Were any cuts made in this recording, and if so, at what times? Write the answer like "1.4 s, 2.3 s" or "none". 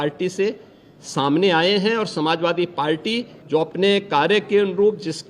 3.3 s